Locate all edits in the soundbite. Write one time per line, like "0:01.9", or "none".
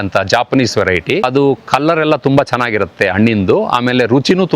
0:01.2